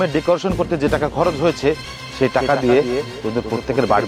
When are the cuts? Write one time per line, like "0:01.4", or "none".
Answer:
none